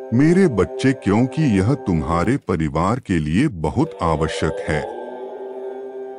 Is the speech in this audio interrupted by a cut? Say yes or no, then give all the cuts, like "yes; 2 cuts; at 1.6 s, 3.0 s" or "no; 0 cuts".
yes; 1 cut; at 4.9 s